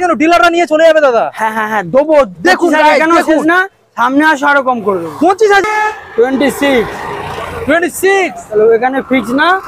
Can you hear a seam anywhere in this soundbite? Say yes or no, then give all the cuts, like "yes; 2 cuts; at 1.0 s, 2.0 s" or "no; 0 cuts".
yes; 1 cut; at 5.6 s